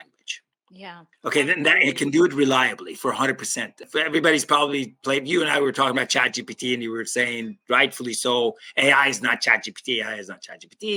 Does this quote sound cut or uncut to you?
uncut